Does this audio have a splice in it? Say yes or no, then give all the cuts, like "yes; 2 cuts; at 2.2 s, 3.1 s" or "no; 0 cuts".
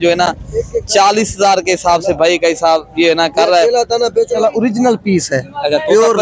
no; 0 cuts